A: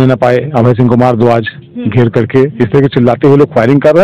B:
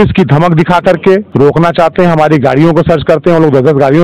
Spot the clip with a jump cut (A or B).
B